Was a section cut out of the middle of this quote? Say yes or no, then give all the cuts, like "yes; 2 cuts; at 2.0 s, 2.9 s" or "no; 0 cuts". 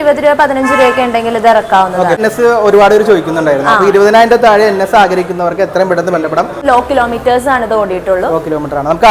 yes; 2 cuts; at 2.2 s, 6.6 s